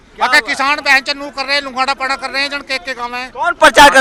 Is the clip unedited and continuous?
yes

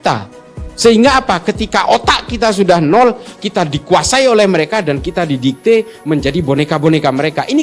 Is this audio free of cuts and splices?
yes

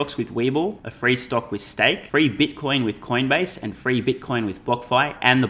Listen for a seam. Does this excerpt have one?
yes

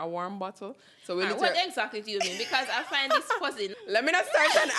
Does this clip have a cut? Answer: yes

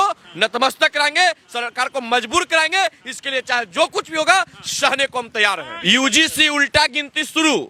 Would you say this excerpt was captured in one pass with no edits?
yes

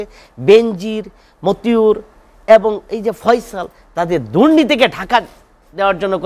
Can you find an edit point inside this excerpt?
no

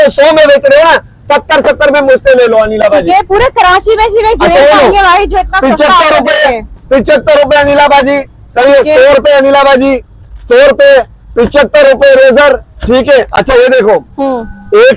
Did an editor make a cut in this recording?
no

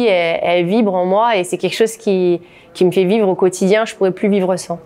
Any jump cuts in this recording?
no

